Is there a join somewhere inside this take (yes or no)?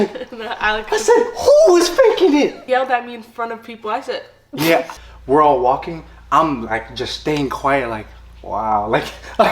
yes